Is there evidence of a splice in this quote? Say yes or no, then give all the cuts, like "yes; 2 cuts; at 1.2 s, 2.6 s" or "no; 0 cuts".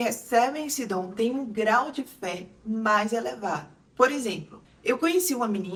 no; 0 cuts